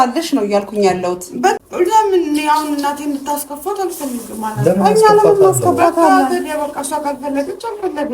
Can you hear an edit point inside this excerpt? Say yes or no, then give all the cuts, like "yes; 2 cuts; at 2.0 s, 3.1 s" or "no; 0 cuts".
yes; 1 cut; at 1.6 s